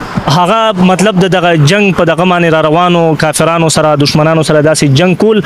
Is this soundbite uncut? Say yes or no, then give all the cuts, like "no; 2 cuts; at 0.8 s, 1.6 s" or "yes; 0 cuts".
yes; 0 cuts